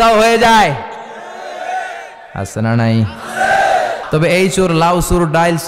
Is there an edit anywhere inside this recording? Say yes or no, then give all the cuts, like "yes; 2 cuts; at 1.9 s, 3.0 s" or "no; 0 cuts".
yes; 1 cut; at 4.0 s